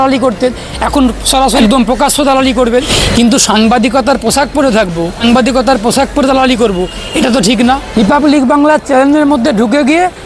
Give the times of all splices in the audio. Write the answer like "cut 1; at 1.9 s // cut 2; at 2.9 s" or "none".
cut 1; at 1.6 s // cut 2; at 2.9 s // cut 3; at 5.2 s // cut 4; at 7.9 s